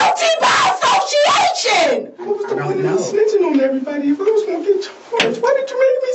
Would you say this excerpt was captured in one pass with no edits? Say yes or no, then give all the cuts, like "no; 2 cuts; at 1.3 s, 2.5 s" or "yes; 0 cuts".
no; 1 cut; at 2.3 s